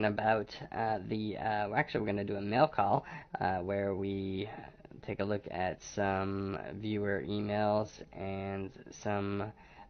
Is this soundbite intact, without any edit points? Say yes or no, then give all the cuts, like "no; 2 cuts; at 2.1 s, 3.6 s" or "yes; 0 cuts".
no; 1 cut; at 7.4 s